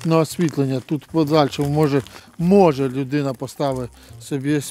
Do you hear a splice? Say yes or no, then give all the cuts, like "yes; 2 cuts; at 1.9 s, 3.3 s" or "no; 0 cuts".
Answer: no; 0 cuts